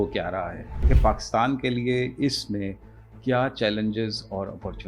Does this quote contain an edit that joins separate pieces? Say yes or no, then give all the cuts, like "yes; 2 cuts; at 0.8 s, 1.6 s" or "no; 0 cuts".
yes; 1 cut; at 0.9 s